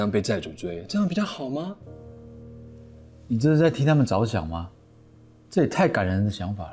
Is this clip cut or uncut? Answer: uncut